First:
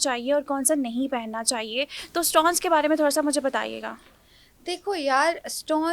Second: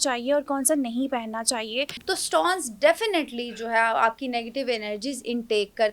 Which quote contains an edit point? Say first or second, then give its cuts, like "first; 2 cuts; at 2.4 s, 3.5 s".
second; 1 cut; at 2.0 s